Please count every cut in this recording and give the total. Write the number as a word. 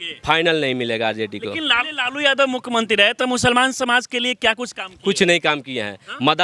zero